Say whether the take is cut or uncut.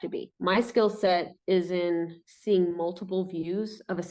uncut